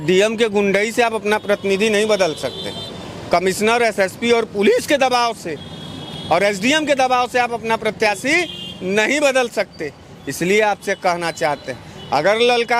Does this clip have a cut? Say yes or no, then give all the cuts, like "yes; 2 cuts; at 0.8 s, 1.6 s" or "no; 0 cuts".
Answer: no; 0 cuts